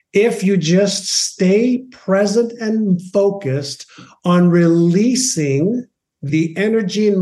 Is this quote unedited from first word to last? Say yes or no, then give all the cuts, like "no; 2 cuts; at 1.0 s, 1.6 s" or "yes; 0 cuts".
no; 1 cut; at 6.3 s